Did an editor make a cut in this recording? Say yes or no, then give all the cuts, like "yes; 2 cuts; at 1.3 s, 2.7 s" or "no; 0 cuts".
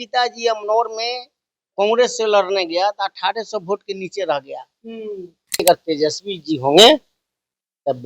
yes; 1 cut; at 5.6 s